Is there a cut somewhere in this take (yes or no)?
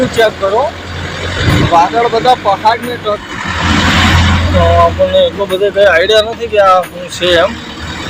yes